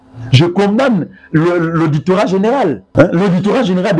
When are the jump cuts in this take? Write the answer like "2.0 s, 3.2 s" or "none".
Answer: 2.8 s